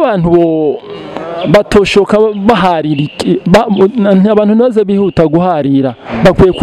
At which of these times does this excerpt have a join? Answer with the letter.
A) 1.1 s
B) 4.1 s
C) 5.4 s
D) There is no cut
D